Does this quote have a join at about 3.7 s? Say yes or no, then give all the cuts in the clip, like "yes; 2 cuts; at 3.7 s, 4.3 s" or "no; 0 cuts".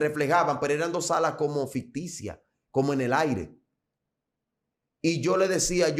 no; 0 cuts